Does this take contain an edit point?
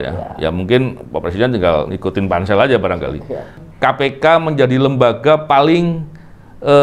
yes; 1 cut; at 3.6 s

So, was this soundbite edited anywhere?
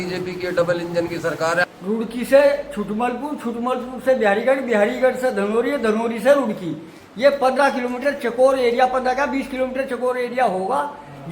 yes; 1 cut; at 1.6 s

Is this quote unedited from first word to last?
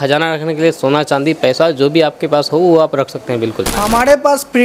no; 1 cut; at 3.7 s

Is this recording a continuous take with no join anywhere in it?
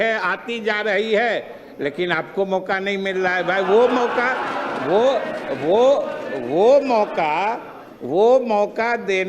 yes; 0 cuts

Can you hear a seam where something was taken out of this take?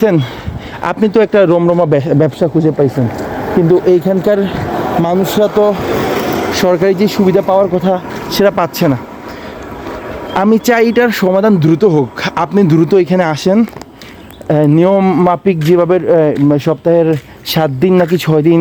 no; 0 cuts

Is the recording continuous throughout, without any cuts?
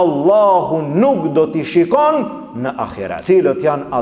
no; 1 cut; at 3.1 s

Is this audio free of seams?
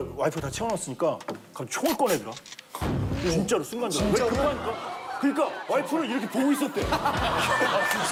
yes; 0 cuts

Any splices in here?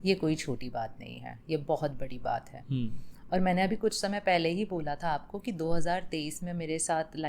no; 0 cuts

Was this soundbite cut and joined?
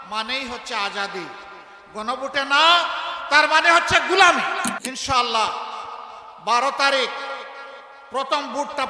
yes; 1 cut; at 4.8 s

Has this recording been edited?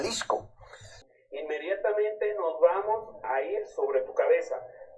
yes; 1 cut; at 0.9 s

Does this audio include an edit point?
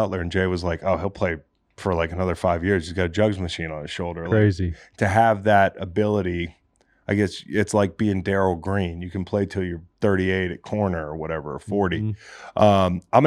no; 0 cuts

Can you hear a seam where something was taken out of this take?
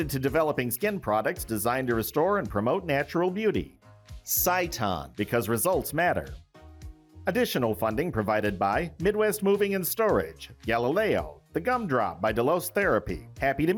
no; 0 cuts

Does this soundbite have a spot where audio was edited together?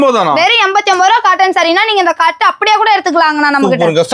no; 0 cuts

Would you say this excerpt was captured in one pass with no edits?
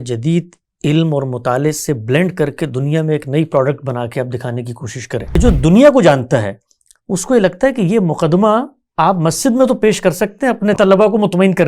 no; 2 cuts; at 5.4 s, 10.8 s

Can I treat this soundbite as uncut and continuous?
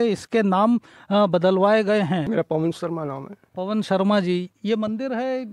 no; 1 cut; at 2.2 s

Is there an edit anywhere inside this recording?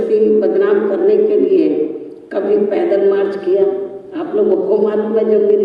no; 0 cuts

